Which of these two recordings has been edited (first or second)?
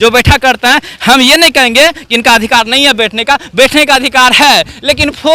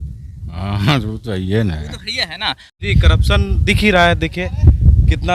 second